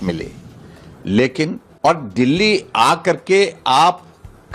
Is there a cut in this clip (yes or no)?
yes